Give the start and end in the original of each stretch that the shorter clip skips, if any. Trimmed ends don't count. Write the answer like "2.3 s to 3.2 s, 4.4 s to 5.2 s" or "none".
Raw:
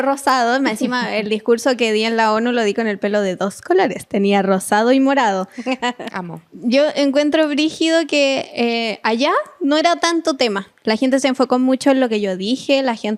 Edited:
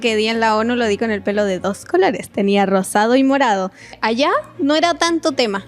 5.6 s to 8.9 s